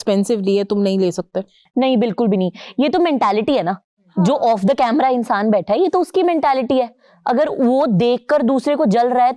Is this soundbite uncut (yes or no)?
yes